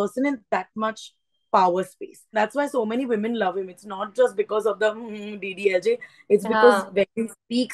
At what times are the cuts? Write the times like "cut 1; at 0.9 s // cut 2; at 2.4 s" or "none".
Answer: cut 1; at 2.3 s